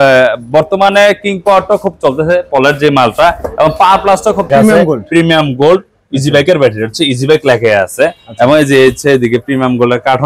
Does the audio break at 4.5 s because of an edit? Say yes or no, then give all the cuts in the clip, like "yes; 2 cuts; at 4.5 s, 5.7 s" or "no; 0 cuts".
yes; 1 cut; at 4.5 s